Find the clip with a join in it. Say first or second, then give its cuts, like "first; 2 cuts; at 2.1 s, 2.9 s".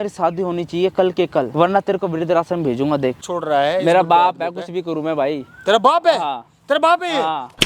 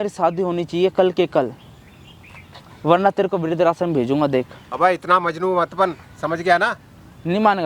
first; 2 cuts; at 1.5 s, 3.3 s